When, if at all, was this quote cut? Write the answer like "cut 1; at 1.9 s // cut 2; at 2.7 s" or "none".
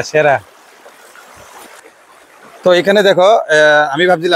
cut 1; at 1.7 s